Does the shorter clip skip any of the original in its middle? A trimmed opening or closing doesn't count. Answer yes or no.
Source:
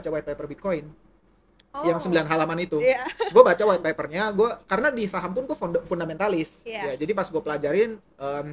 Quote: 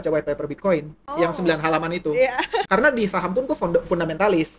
yes